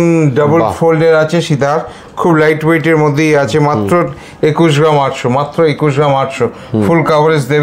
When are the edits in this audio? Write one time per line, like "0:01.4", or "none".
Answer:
none